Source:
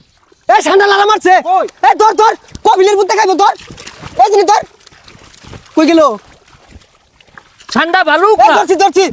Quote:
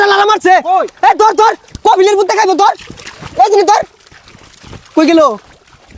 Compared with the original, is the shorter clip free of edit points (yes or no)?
yes